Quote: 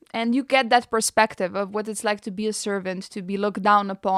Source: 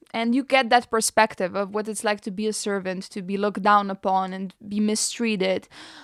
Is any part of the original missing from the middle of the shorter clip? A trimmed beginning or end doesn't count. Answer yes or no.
no